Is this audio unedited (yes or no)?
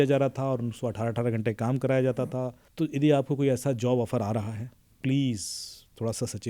no